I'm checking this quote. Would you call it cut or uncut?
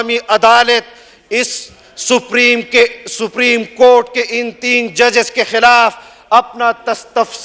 uncut